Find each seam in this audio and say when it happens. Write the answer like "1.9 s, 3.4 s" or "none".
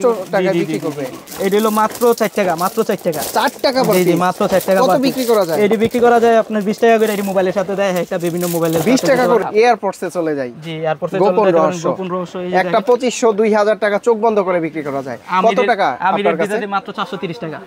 1.3 s, 9.5 s